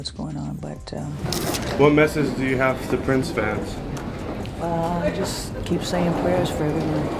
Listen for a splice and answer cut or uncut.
cut